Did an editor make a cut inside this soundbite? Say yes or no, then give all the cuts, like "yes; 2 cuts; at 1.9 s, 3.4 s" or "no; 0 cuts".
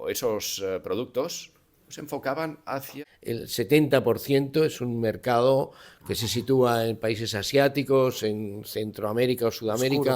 yes; 1 cut; at 2.9 s